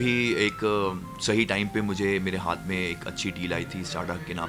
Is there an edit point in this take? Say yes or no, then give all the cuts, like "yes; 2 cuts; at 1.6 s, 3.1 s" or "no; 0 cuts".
no; 0 cuts